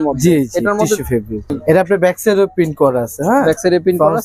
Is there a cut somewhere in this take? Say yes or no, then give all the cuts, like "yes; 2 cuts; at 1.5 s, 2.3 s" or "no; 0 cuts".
yes; 1 cut; at 1.5 s